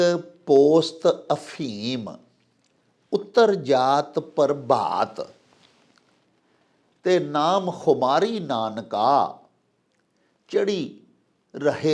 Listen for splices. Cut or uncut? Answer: uncut